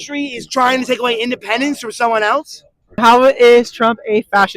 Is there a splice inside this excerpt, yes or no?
yes